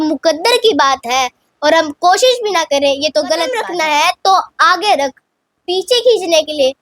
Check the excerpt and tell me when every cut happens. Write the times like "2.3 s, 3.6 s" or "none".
3.7 s